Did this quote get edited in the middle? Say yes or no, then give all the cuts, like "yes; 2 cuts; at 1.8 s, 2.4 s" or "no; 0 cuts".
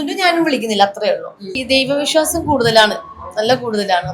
yes; 1 cut; at 1.6 s